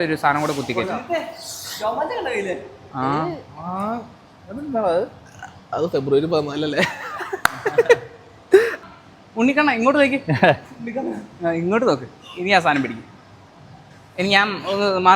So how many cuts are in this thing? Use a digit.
1